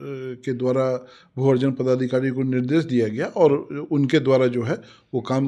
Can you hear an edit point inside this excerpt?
no; 0 cuts

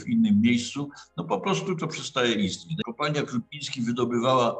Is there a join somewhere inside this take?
yes; 1 cut; at 2.7 s

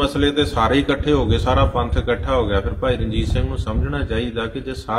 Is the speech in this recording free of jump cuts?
yes; 0 cuts

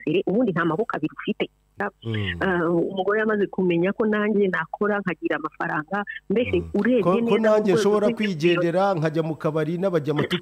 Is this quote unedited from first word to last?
no; 1 cut; at 1.8 s

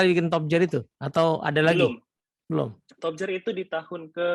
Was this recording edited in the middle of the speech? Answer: no; 0 cuts

